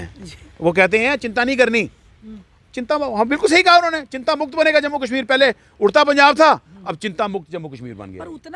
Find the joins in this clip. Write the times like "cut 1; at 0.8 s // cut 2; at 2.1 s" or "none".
none

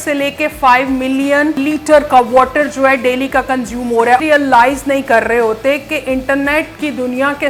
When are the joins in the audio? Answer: cut 1; at 1.6 s // cut 2; at 4.2 s

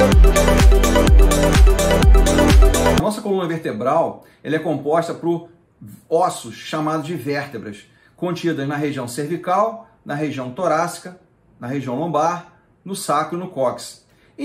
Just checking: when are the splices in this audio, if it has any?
cut 1; at 3.0 s

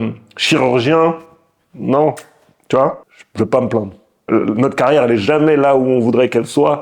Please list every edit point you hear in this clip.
cut 1; at 3.0 s // cut 2; at 4.1 s

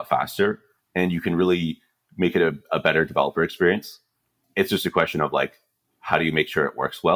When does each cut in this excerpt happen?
cut 1; at 4.3 s

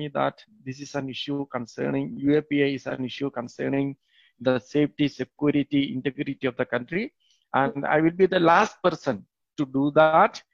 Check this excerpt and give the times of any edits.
none

